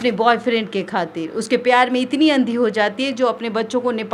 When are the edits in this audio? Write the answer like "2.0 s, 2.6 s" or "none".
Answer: none